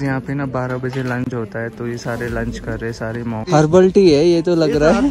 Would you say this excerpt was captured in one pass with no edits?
no; 1 cut; at 3.4 s

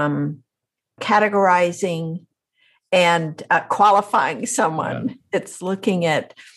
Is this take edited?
yes; 1 cut; at 1.0 s

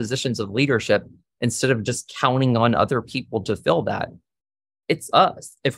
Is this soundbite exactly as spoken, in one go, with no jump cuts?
yes; 0 cuts

